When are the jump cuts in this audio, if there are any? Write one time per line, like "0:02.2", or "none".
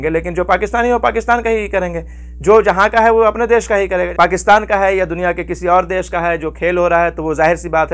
0:04.1